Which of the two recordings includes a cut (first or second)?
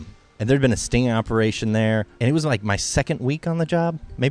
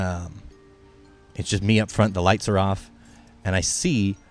first